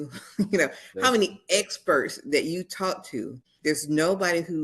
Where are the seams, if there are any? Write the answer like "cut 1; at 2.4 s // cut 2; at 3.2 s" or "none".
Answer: cut 1; at 3.4 s